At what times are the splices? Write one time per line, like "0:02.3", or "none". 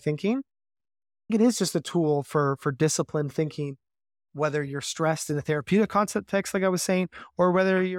0:01.3

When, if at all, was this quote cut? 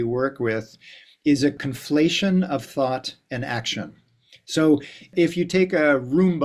0:01.6
0:05.1

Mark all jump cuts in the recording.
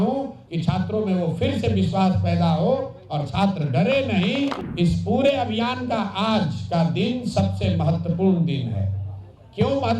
0:04.6

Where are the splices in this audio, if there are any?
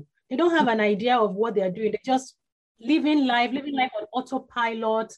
0:02.7

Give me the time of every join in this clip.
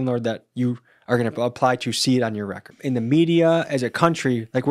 0:02.7

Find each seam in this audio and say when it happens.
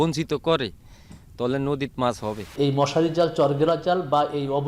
0:02.5

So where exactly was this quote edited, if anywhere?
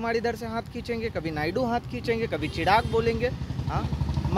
none

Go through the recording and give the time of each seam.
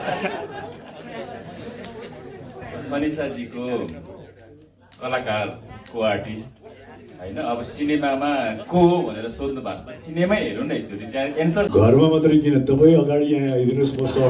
0:11.7

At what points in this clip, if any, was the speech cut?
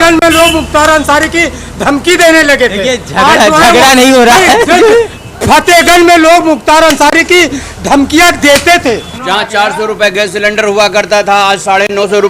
0:09.1

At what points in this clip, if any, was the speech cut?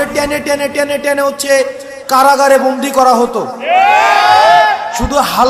none

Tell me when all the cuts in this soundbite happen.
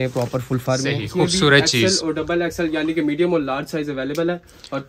0:01.0

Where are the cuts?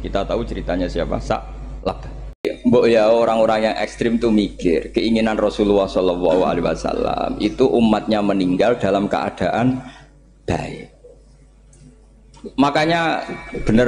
0:02.5

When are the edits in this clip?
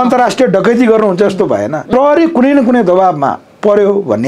0:01.8

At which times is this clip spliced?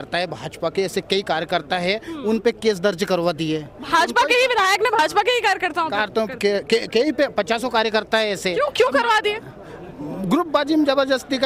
none

